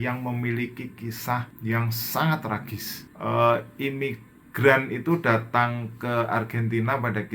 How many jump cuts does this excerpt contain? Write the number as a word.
two